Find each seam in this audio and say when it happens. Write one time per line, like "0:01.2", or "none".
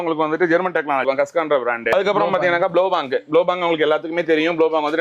none